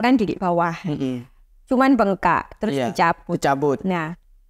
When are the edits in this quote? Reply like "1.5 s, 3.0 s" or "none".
none